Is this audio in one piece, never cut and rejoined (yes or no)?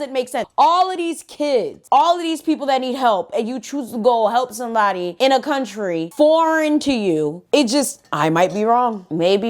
yes